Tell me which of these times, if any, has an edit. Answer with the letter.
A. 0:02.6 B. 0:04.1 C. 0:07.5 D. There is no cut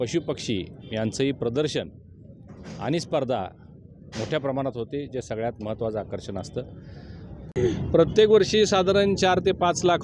C